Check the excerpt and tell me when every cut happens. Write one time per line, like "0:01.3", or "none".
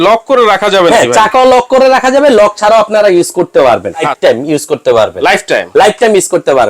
0:04.1